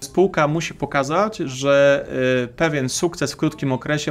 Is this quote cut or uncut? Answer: uncut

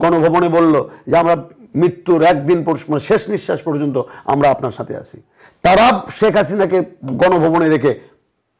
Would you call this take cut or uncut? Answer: uncut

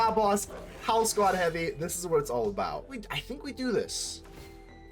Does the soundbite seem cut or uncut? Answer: cut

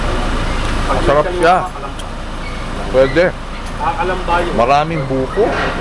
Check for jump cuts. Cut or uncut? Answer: uncut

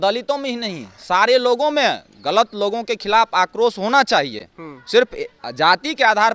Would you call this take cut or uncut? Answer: uncut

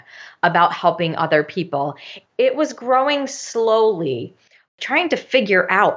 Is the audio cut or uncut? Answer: cut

